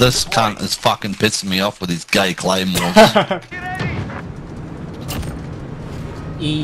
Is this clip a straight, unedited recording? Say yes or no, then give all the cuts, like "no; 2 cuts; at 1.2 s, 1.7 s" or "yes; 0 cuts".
no; 1 cut; at 3.5 s